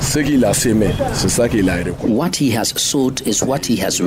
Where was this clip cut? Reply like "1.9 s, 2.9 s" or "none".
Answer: 1.0 s